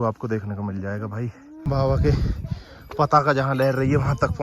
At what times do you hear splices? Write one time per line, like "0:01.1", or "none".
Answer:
0:01.5